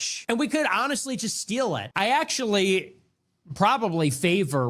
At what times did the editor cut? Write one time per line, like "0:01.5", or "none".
0:01.9